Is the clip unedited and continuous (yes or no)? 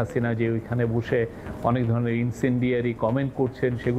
yes